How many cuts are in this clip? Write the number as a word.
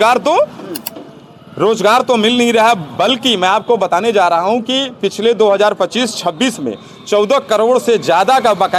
zero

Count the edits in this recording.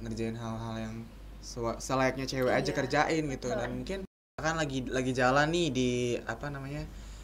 one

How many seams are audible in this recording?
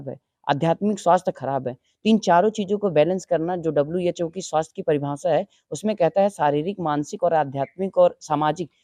zero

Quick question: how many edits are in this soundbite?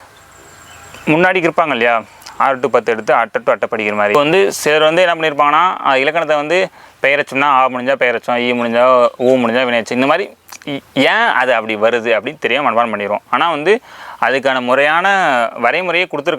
one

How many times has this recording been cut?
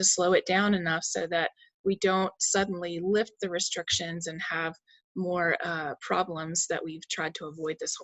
zero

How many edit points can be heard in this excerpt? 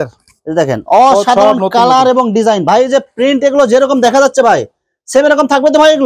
zero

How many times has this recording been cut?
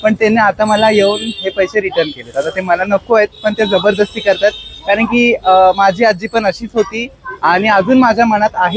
zero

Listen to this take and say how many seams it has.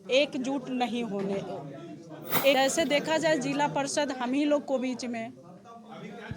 one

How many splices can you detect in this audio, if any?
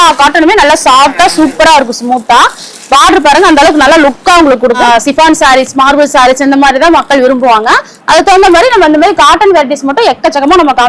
one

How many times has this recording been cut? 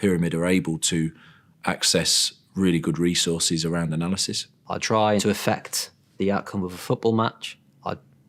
one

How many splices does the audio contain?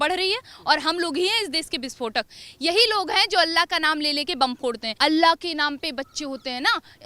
one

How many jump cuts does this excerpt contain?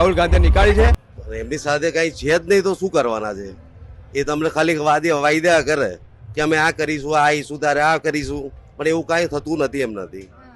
one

